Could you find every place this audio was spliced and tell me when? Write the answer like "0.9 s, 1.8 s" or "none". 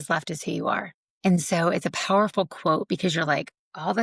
1.0 s